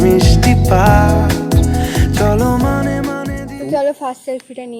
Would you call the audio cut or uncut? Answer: cut